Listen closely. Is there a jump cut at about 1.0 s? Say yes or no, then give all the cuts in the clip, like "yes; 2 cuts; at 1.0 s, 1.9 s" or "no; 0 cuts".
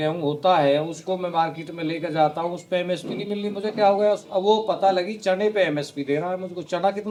no; 0 cuts